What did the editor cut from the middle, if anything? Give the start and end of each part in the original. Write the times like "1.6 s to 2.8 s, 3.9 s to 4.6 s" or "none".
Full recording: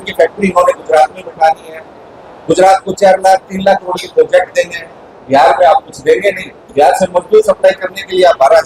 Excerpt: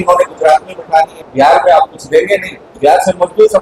1.7 s to 5.1 s